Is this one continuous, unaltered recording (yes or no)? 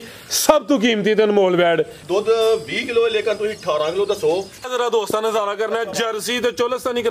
no